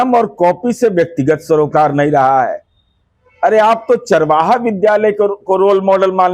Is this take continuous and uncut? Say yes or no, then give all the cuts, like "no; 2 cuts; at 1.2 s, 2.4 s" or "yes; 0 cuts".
yes; 0 cuts